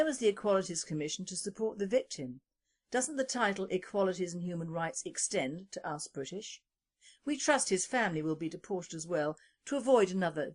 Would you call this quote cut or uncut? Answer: cut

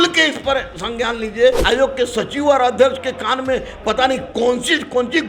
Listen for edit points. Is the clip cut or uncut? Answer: cut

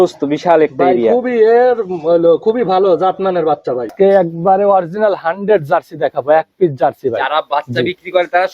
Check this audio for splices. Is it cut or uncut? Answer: cut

